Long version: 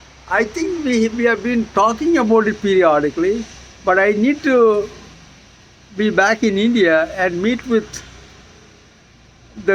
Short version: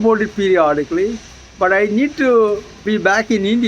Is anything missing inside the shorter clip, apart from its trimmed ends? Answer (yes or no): yes